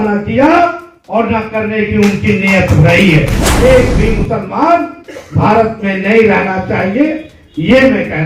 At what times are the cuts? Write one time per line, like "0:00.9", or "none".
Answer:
0:03.5